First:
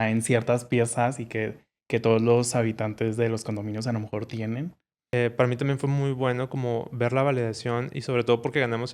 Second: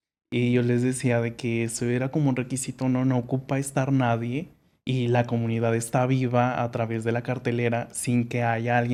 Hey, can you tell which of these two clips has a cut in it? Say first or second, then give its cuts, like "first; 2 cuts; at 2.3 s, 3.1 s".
first; 1 cut; at 5.1 s